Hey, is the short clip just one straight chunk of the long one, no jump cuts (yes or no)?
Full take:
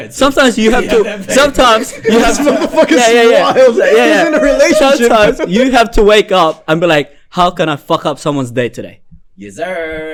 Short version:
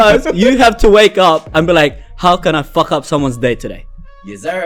yes